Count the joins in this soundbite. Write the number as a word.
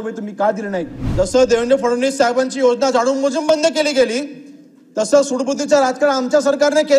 one